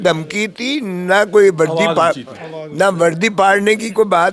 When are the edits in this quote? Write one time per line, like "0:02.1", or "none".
none